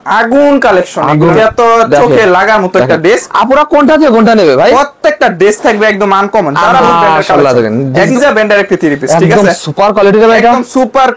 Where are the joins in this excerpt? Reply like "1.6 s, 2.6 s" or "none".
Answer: 1.3 s, 6.8 s, 8.1 s

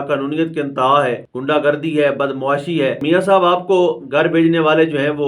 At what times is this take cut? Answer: 1.3 s, 3.0 s

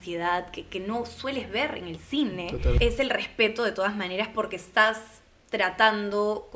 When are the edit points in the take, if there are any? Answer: 2.8 s

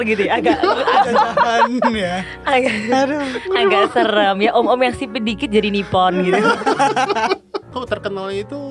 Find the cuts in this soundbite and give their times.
7.7 s

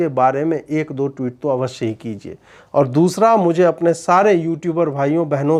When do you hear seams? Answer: none

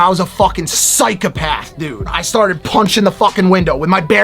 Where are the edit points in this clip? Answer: 2.2 s

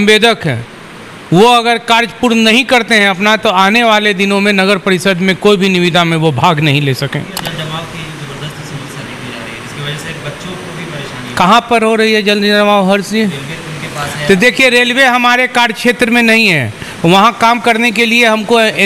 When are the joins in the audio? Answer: 7.4 s

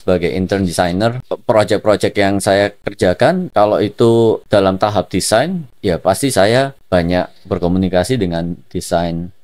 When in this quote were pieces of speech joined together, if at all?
1.3 s, 3.0 s, 4.4 s, 5.7 s, 6.8 s

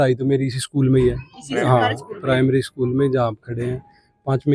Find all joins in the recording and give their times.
none

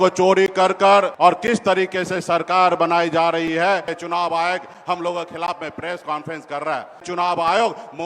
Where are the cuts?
1.1 s, 3.9 s, 7.0 s

